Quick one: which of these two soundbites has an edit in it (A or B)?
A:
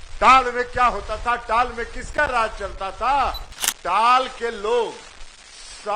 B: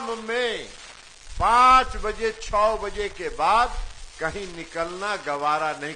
A